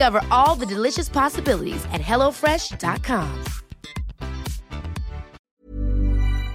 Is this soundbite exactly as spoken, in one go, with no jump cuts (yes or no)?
no